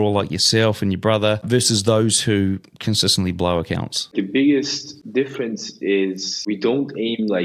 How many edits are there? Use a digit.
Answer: 4